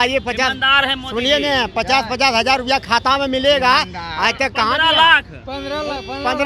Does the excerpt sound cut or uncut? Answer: uncut